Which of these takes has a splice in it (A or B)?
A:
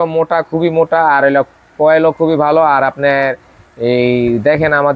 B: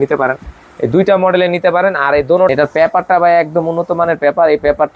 B